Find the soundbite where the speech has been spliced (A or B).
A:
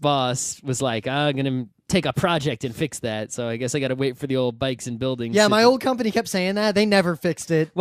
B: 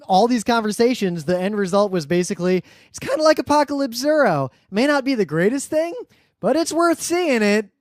B